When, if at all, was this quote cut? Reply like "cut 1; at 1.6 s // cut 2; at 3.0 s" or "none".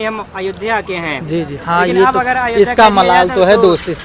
none